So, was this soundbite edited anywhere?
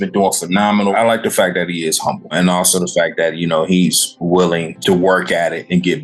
yes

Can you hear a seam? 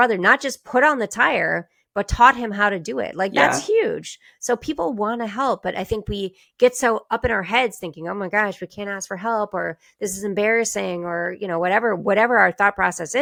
no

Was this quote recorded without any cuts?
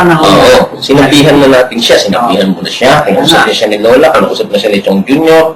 yes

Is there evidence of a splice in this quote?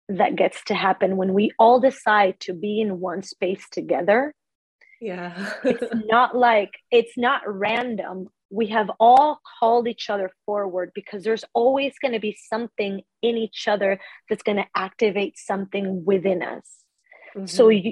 no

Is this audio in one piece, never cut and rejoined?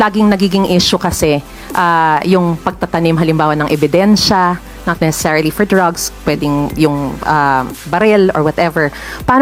yes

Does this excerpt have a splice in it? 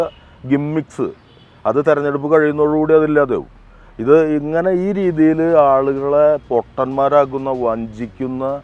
no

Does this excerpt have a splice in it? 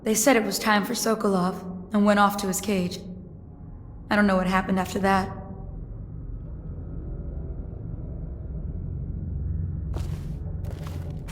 yes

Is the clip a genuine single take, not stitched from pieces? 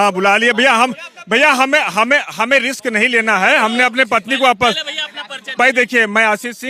yes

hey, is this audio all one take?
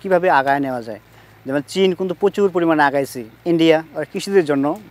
yes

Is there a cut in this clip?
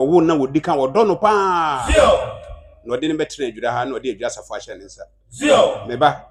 no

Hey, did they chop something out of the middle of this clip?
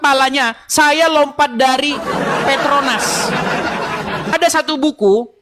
yes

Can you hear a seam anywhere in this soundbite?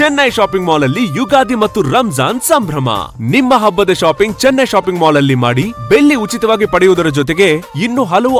no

